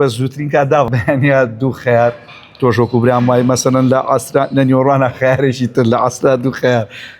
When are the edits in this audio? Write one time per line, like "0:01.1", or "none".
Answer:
0:00.9